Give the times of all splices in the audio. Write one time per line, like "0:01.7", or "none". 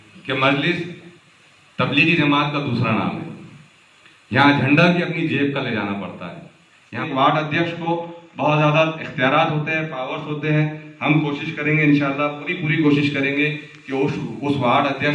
0:07.0